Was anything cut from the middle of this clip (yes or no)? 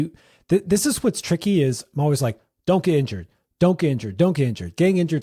no